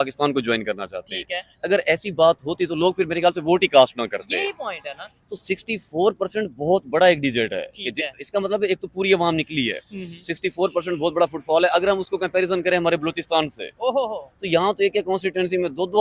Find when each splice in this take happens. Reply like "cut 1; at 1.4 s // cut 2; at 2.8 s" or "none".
none